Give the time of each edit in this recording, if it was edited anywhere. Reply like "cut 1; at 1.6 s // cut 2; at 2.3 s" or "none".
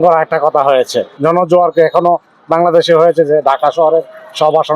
cut 1; at 1.1 s